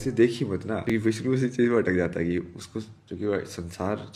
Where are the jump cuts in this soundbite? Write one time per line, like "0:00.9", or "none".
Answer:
0:00.9